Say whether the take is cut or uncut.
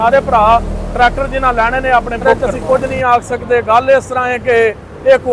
cut